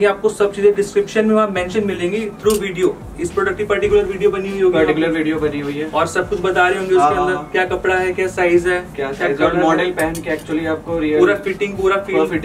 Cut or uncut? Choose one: uncut